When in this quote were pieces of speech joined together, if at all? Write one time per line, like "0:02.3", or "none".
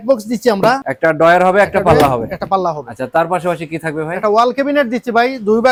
none